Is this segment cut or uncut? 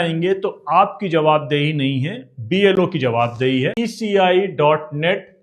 cut